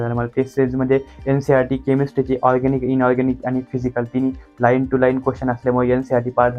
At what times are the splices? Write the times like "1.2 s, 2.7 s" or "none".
none